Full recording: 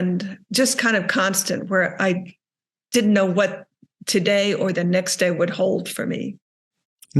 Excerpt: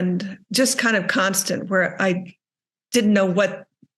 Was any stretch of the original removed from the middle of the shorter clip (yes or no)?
no